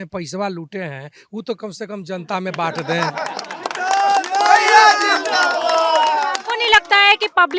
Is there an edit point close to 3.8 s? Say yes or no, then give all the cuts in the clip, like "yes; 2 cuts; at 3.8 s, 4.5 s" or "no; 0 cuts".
no; 0 cuts